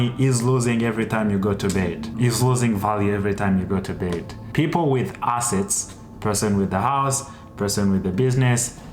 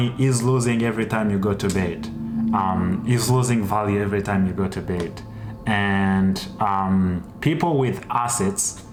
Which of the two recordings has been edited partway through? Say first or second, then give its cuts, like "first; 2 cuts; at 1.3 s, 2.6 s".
first; 2 cuts; at 2.1 s, 4.4 s